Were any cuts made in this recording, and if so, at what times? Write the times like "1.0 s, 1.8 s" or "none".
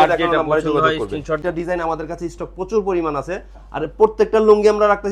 1.4 s